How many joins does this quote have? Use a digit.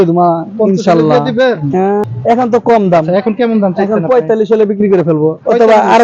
1